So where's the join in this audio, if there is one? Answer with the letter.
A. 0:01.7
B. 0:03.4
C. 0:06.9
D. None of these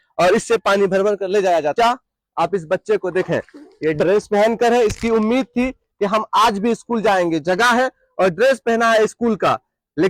A